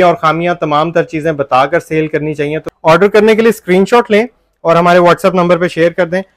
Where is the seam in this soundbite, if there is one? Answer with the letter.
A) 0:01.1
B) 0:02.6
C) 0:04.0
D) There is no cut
B